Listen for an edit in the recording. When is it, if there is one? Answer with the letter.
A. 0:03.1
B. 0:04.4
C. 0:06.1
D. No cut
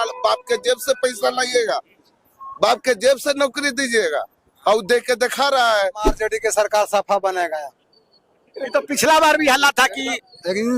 C